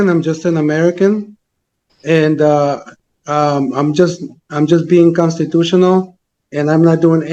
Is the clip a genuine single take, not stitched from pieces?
yes; 0 cuts

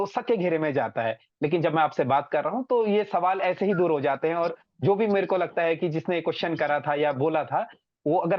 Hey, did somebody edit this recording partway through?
no; 0 cuts

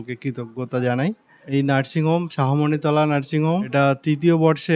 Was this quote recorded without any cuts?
yes; 0 cuts

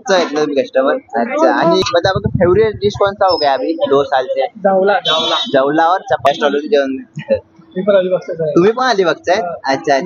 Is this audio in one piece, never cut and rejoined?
no; 2 cuts; at 1.8 s, 6.2 s

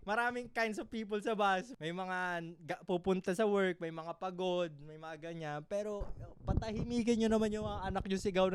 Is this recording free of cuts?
no; 1 cut; at 1.7 s

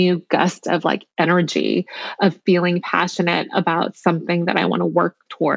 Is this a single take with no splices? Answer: yes; 0 cuts

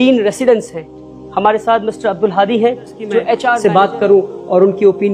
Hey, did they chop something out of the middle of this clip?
yes; 1 cut; at 3.6 s

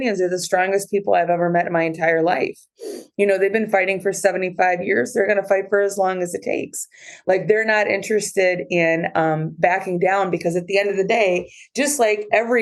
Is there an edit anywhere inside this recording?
no; 0 cuts

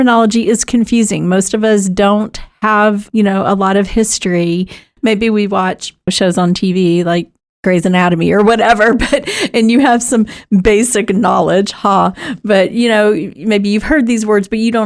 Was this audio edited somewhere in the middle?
no; 0 cuts

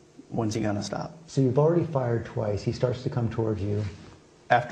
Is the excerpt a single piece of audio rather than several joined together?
no; 1 cut; at 2.3 s

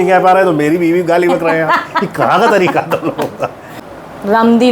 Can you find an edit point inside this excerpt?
yes; 1 cut; at 3.7 s

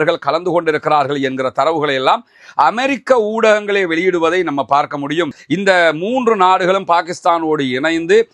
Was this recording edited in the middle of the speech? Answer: yes; 1 cut; at 5.4 s

